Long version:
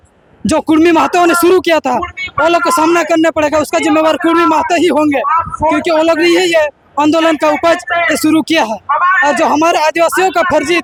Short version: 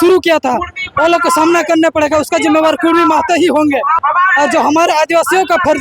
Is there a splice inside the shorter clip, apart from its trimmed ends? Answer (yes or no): yes